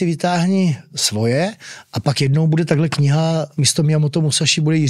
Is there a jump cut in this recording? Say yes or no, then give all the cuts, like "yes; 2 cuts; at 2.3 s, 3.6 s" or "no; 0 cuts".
yes; 1 cut; at 3.6 s